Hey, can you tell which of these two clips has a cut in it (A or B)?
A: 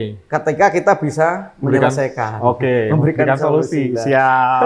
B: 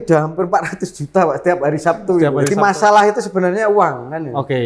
B